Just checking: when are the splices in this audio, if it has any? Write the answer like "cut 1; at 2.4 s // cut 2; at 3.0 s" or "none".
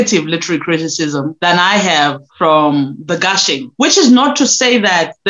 cut 1; at 1.3 s // cut 2; at 2.2 s // cut 3; at 3.6 s